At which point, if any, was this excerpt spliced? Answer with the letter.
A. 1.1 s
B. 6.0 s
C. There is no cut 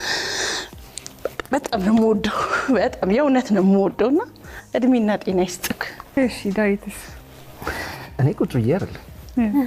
B